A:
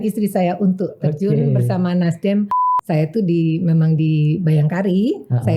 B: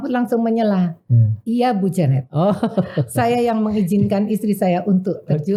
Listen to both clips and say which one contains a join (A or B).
A